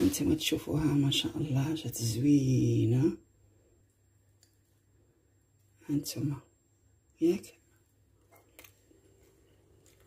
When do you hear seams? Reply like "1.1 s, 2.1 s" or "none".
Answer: 3.8 s